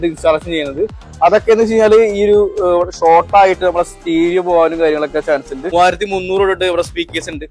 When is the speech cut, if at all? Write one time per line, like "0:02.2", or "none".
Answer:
0:05.7